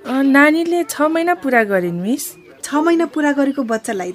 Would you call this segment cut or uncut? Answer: cut